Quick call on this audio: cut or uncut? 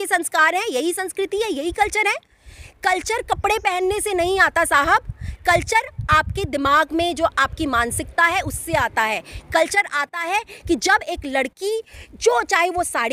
uncut